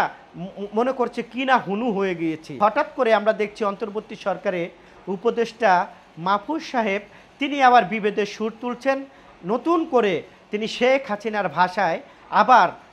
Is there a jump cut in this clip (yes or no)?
yes